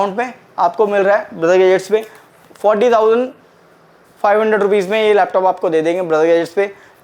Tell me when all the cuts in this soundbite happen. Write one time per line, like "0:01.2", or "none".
none